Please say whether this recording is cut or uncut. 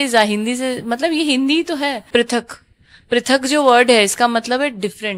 cut